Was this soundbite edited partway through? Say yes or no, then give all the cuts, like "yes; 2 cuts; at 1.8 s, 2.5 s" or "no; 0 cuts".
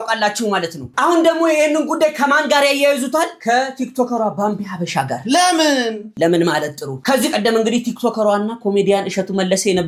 no; 0 cuts